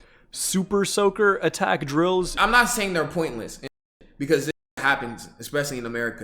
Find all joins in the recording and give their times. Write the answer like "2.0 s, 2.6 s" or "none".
2.3 s